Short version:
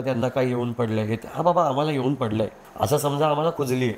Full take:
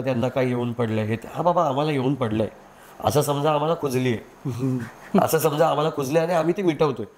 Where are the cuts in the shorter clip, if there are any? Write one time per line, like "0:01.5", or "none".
0:02.6